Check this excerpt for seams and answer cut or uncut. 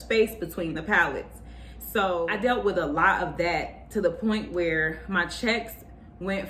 cut